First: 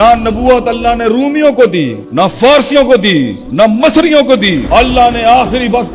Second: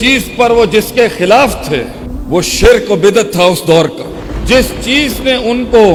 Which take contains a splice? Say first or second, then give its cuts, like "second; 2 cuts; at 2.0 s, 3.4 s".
first; 3 cuts; at 2.0 s, 3.4 s, 4.6 s